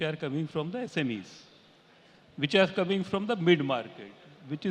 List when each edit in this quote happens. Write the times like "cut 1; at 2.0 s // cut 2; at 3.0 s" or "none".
none